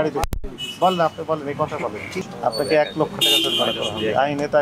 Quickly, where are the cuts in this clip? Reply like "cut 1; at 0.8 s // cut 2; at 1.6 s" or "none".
cut 1; at 2.1 s